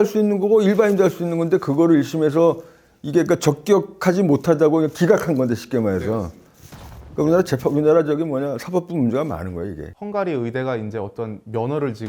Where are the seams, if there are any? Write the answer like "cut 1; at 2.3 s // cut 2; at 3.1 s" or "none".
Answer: cut 1; at 9.9 s